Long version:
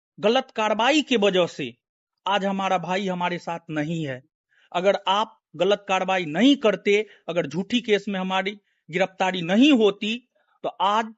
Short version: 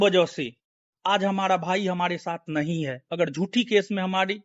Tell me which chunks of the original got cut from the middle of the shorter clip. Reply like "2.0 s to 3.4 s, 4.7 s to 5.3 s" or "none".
4.2 s to 7.2 s